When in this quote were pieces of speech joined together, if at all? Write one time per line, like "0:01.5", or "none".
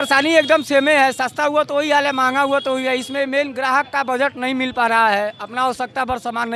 none